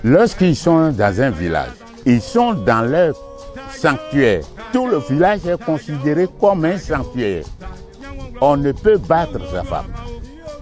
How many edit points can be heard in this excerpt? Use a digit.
2